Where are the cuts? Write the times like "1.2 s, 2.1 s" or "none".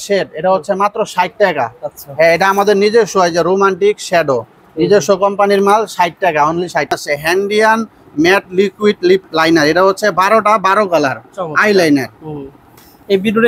6.9 s